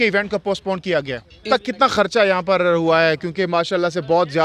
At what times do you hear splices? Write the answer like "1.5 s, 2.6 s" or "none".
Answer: 1.4 s

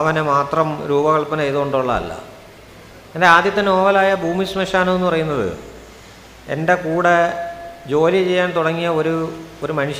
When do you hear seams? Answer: none

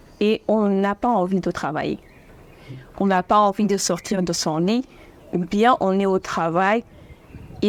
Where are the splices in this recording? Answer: none

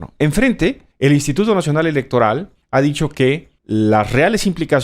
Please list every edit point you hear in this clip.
0.9 s, 2.5 s, 3.5 s

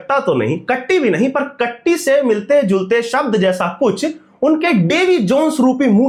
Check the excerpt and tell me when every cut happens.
none

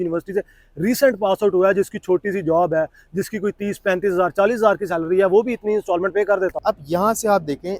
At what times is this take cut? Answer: 6.6 s

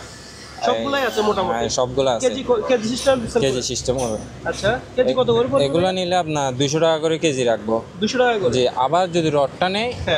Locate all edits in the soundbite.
none

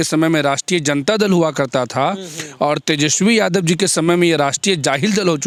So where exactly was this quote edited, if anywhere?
none

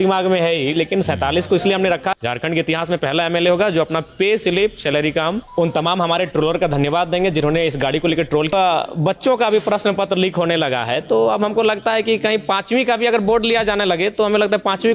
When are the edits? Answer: 2.2 s, 5.4 s, 8.5 s

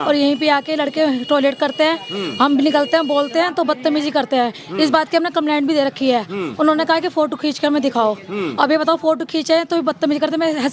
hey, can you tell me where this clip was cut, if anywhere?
none

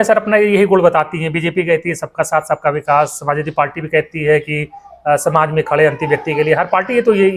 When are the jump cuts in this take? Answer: none

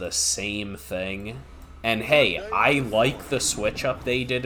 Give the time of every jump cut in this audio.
none

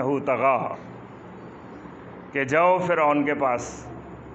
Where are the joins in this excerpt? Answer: none

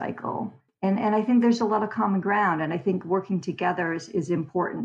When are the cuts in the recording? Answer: none

